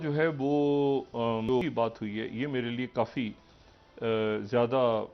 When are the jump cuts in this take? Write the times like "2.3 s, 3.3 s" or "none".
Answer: 1.5 s

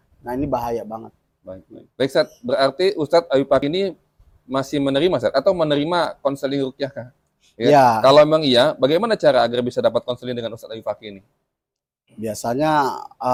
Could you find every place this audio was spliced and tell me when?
none

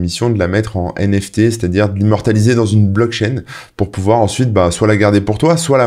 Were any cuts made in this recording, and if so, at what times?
none

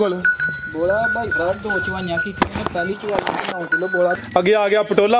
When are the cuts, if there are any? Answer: 4.2 s

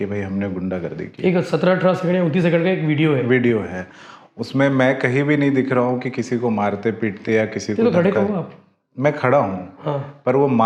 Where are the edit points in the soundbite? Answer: none

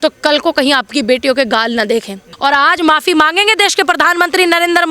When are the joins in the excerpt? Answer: 2.3 s

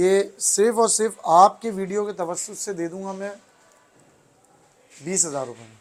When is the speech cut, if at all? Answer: none

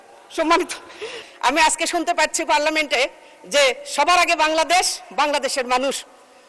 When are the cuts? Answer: 1.2 s

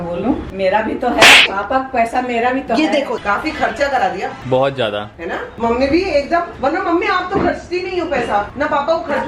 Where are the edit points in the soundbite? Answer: 1.4 s, 3.2 s

